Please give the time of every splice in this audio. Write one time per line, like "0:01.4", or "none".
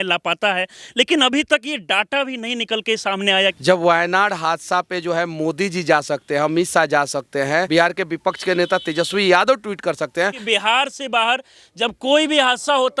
0:03.4
0:07.7
0:10.4